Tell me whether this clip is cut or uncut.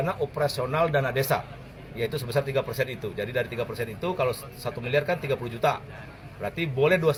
uncut